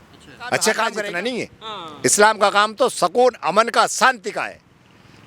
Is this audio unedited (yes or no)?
no